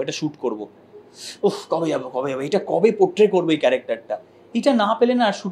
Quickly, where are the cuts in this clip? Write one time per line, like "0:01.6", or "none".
none